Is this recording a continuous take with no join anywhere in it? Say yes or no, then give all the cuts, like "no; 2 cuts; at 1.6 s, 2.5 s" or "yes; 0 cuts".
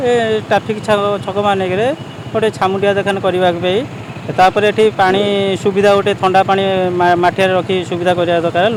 yes; 0 cuts